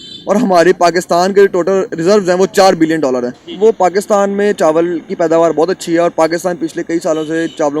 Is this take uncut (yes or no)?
no